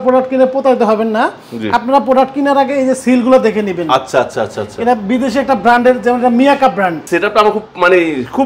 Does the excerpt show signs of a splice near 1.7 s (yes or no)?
no